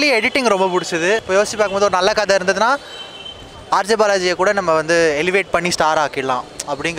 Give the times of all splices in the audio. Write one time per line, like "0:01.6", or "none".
0:01.2